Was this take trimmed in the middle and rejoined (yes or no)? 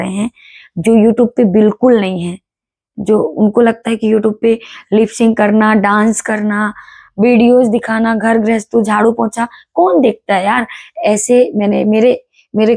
no